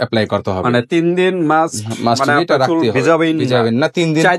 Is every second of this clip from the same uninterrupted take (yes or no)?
yes